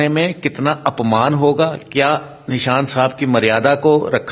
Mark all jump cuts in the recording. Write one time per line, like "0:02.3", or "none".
none